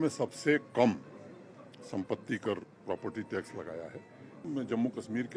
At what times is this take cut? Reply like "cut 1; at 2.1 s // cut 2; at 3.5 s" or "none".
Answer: cut 1; at 4.5 s